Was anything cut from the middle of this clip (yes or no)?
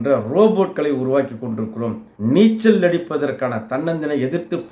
yes